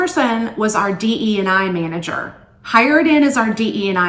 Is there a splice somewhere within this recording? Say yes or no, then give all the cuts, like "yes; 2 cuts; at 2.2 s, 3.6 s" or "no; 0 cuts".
no; 0 cuts